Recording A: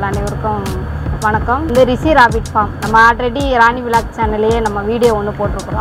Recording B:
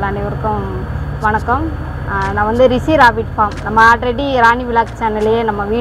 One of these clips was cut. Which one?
A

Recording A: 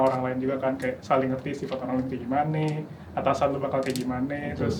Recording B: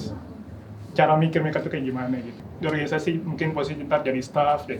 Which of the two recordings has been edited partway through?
B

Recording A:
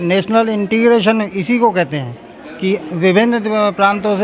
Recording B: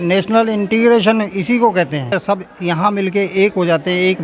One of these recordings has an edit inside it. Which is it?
B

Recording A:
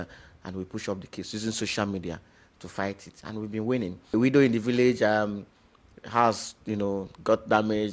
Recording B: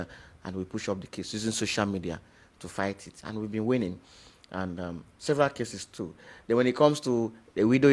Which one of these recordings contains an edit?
A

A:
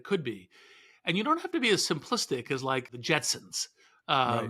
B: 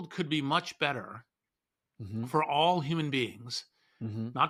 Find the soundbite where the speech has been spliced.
A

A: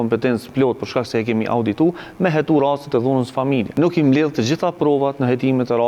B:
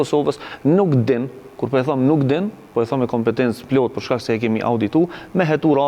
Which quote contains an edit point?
A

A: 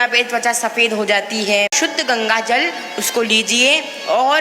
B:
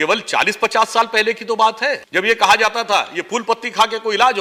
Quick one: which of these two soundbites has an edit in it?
A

